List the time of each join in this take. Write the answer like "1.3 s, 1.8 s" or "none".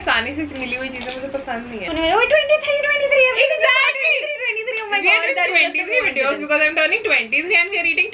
1.9 s

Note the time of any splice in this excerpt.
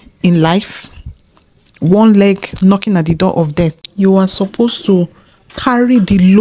3.8 s

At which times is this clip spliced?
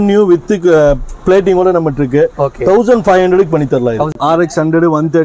4.1 s

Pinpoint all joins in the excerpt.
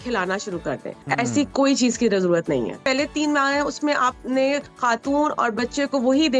0.9 s, 2.8 s, 4.7 s

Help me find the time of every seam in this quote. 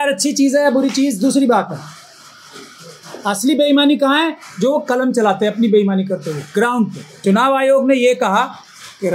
7.2 s

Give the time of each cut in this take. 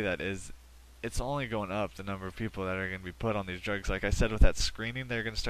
1.4 s

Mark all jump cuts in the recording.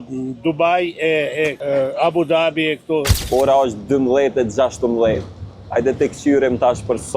3.2 s

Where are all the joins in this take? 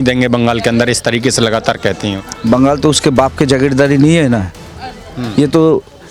none

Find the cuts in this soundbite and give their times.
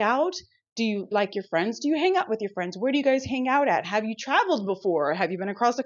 1.1 s

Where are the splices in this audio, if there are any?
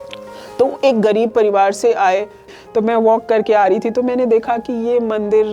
2.4 s

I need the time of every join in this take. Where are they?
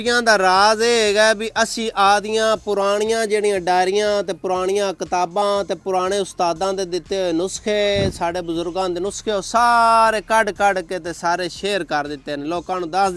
none

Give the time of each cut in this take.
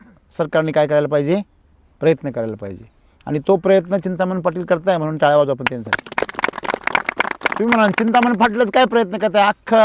none

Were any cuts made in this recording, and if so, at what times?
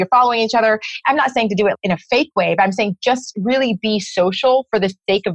0.9 s, 1.8 s

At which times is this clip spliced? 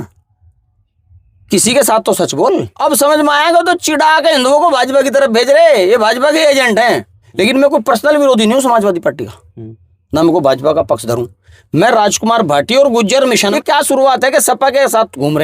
2.7 s, 7.2 s, 13.5 s

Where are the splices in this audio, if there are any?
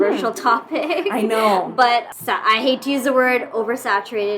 2.1 s

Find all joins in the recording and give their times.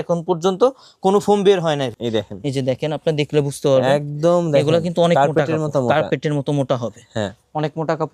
1.9 s

